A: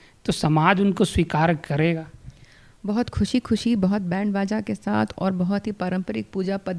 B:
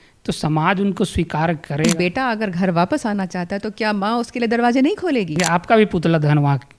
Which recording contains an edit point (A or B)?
B